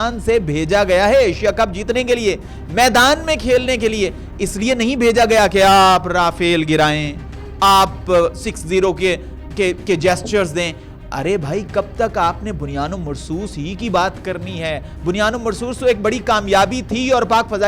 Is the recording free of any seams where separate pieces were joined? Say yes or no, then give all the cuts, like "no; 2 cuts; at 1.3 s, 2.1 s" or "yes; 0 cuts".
yes; 0 cuts